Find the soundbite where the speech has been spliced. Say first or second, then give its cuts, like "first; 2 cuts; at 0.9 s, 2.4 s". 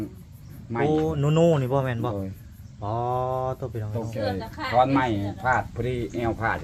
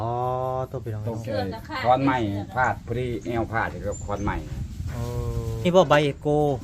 second; 1 cut; at 5.7 s